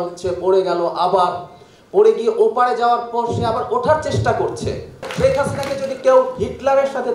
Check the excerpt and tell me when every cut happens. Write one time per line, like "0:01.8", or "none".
0:05.1